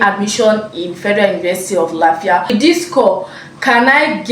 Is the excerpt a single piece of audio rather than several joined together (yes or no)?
no